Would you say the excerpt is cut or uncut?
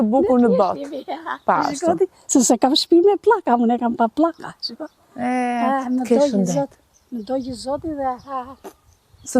uncut